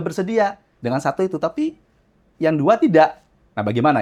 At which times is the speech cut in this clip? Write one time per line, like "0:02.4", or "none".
none

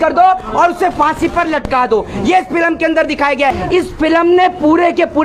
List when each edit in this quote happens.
0:03.6

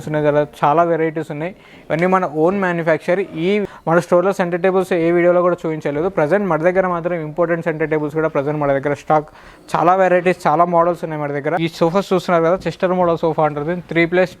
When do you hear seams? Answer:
0:03.7
0:11.6

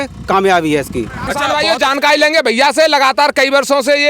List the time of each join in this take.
0:01.4

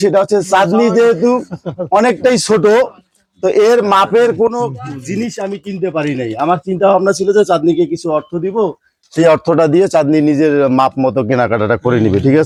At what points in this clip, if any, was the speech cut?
none

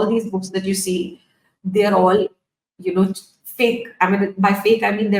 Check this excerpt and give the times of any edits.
none

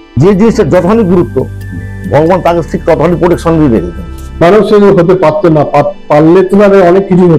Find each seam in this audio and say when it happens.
0:04.4

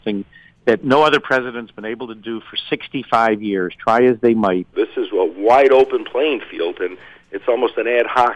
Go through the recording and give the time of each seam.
0:04.7

